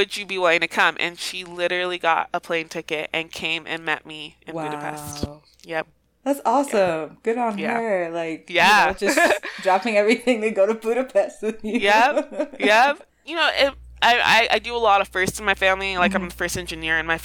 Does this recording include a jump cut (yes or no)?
yes